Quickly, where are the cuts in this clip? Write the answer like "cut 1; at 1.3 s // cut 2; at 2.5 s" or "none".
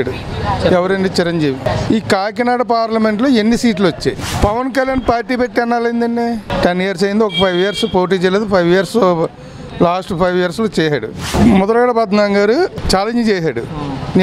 cut 1; at 1.7 s // cut 2; at 4.3 s // cut 3; at 6.5 s // cut 4; at 11.3 s // cut 5; at 12.8 s